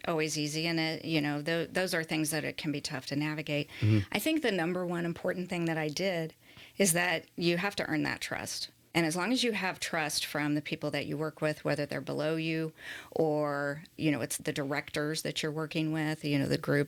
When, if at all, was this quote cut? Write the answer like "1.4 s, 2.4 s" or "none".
none

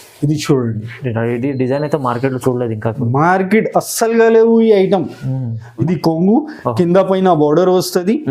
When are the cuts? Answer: 5.8 s

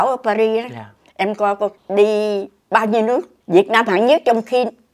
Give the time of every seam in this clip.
1.8 s, 3.3 s

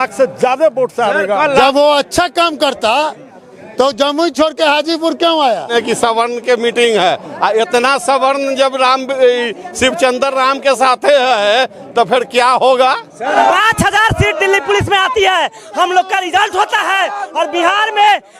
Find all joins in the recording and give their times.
1.6 s, 5.7 s, 13.3 s

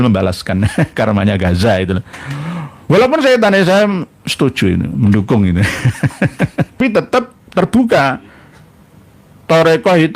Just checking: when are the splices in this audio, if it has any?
6.8 s

